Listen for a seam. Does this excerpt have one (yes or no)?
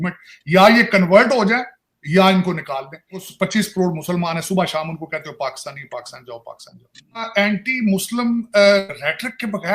yes